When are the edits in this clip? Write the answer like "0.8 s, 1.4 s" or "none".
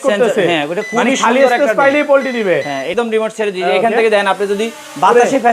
2.9 s